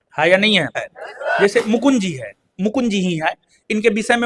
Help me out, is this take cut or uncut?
cut